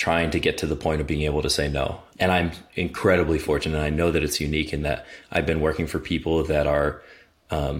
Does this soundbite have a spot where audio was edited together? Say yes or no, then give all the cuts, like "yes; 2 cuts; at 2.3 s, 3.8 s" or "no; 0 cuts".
yes; 1 cut; at 2.0 s